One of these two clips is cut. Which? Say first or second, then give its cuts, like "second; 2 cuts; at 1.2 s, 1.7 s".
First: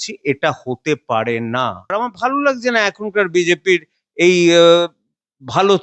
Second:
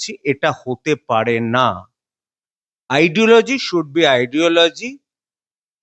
first; 1 cut; at 1.9 s